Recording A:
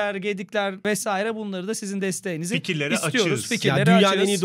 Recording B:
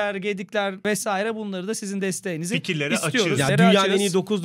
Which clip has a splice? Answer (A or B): B